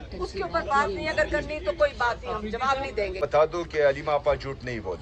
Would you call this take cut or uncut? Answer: cut